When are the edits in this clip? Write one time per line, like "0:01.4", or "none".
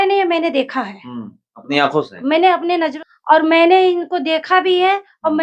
0:02.9